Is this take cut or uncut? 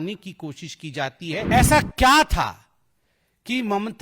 cut